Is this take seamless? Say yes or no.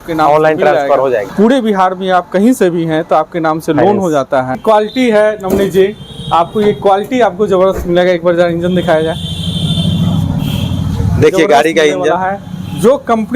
no